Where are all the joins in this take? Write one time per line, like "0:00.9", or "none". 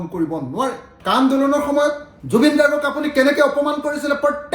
0:00.9